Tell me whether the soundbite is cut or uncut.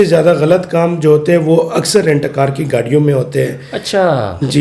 uncut